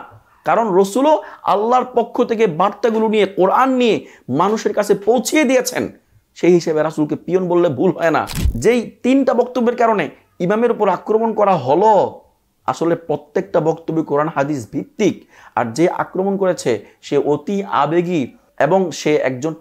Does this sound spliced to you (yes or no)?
yes